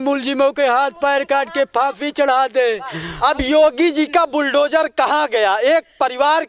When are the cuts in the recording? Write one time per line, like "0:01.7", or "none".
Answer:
none